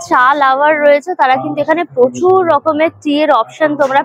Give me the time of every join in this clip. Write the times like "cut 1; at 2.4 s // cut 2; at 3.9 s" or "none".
none